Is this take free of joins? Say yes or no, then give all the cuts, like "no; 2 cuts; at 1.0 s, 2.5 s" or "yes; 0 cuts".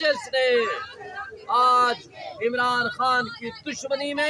yes; 0 cuts